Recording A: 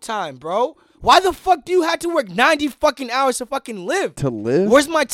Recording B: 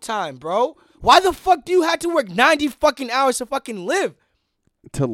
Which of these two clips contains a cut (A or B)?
A